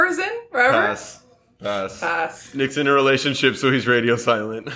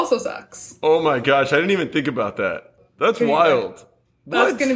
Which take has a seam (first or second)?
first